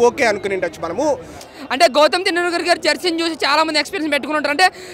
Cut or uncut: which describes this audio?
cut